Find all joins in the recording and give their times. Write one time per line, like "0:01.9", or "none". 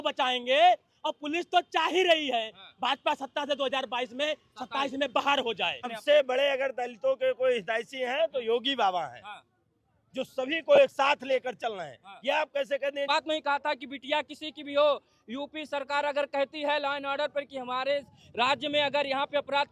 0:05.9
0:13.1